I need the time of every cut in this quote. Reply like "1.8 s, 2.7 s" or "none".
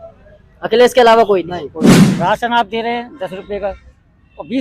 2.1 s

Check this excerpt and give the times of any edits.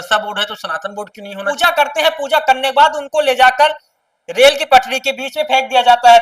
1.5 s

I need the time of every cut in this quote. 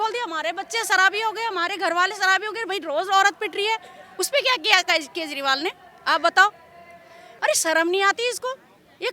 7.2 s

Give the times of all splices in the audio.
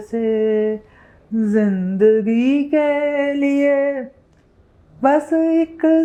none

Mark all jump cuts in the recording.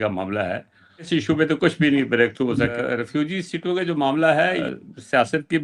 1.1 s, 2.8 s, 4.6 s

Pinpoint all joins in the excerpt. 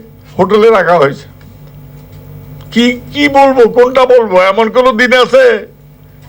none

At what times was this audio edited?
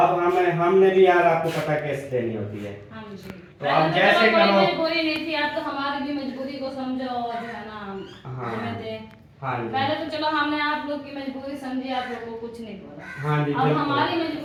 none

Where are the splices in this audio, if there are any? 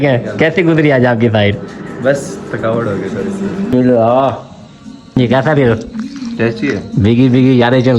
3.7 s, 5.1 s

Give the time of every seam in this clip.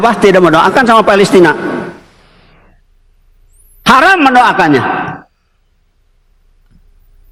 none

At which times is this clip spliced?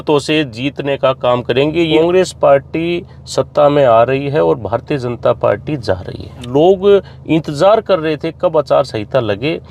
1.9 s, 6.3 s

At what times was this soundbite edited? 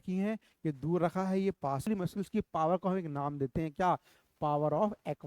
1.9 s

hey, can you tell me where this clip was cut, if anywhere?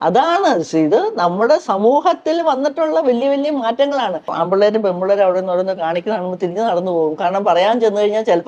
4.4 s

